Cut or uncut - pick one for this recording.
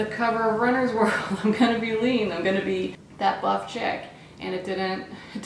cut